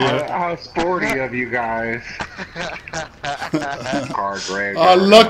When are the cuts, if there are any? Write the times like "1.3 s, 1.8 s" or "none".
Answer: 4.1 s